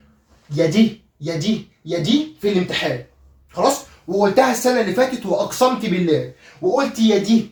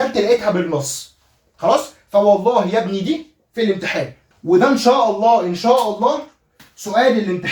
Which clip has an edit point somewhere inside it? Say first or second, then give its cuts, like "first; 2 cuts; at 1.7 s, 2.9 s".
second; 1 cut; at 4.2 s